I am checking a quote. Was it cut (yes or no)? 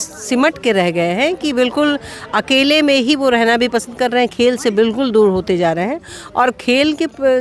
no